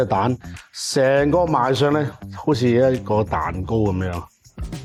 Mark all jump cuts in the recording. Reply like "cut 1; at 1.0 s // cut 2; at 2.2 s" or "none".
none